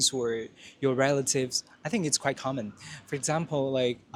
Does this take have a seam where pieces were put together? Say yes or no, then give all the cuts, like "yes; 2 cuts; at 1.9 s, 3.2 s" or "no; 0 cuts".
no; 0 cuts